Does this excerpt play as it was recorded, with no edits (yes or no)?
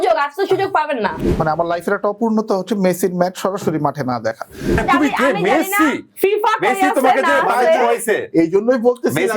no